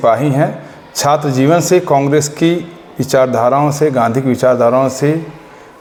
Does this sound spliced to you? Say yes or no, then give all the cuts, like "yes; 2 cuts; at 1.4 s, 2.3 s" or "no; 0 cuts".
no; 0 cuts